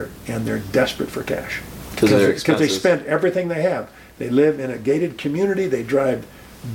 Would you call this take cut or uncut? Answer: uncut